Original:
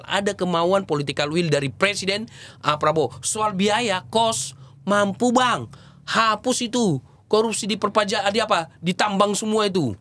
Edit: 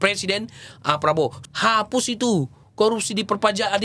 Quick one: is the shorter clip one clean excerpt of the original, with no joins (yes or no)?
no